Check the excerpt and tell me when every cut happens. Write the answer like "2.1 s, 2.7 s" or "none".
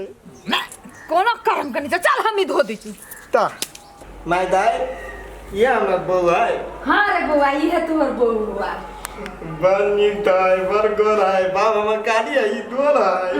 4.1 s